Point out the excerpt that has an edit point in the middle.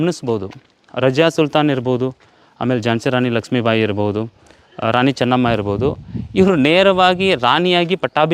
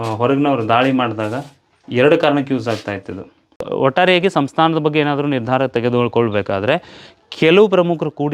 second; 1 cut; at 3.6 s

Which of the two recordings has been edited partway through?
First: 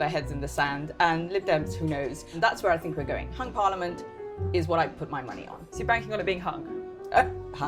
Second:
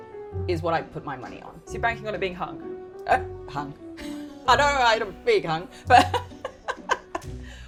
first; 1 cut; at 2.4 s

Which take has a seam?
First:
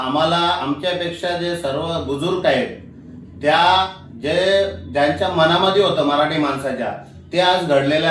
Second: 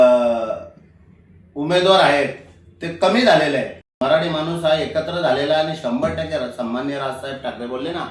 second; 1 cut; at 3.8 s

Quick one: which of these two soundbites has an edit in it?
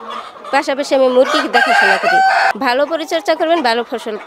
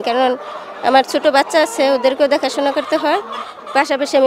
first; 1 cut; at 2.5 s

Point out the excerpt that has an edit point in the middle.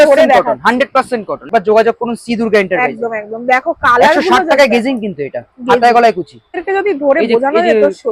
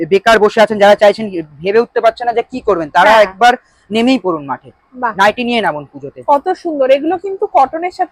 first; 2 cuts; at 1.5 s, 6.6 s

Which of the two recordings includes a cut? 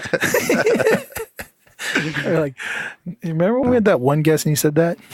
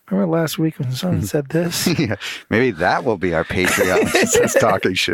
first; 1 cut; at 3.6 s

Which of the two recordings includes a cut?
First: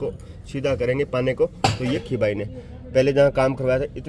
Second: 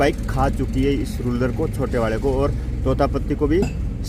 first; 1 cut; at 2.1 s

